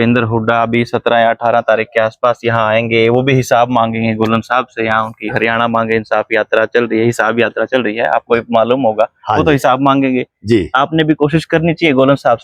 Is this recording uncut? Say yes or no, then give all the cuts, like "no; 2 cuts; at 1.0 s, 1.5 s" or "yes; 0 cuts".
yes; 0 cuts